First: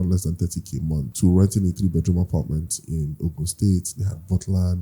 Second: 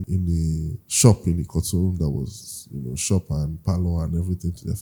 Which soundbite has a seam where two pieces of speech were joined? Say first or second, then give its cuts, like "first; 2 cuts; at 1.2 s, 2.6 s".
first; 1 cut; at 1.1 s